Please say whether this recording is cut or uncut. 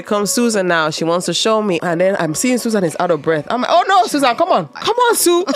cut